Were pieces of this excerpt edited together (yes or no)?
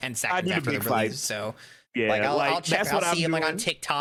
no